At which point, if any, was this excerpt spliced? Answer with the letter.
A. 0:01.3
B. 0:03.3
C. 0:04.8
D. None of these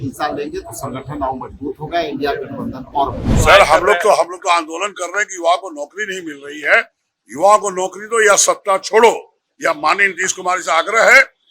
B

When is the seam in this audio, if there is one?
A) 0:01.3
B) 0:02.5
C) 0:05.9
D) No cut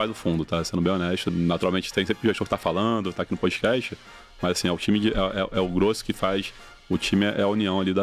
A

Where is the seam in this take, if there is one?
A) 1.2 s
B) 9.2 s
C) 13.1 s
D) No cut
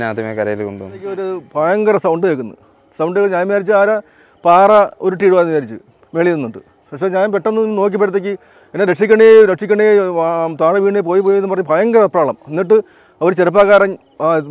A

